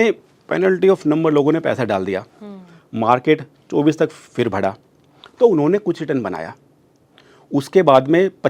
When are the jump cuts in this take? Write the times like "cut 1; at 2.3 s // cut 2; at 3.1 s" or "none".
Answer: none